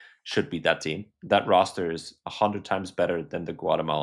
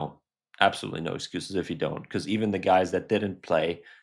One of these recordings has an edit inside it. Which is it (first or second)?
first